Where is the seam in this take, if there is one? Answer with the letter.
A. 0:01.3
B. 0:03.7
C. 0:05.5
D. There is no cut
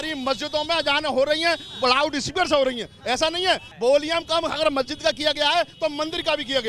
B